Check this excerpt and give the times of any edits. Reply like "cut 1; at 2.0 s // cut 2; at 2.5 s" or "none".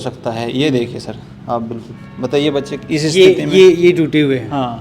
none